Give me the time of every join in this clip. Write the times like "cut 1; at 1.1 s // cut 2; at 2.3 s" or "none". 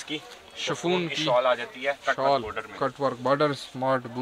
none